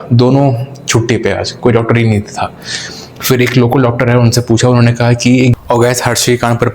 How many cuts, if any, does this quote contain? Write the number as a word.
one